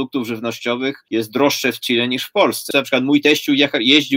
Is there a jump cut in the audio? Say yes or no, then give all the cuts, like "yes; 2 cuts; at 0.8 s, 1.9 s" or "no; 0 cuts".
yes; 2 cuts; at 1.0 s, 2.7 s